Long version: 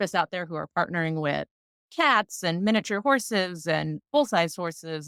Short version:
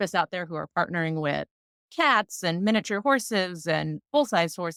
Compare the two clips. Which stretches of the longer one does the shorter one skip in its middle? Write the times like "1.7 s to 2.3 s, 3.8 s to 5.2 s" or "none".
none